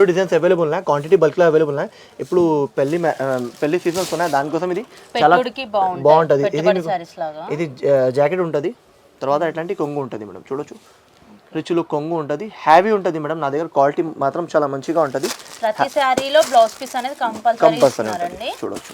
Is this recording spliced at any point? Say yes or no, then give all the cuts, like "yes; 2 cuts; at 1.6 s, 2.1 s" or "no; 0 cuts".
no; 0 cuts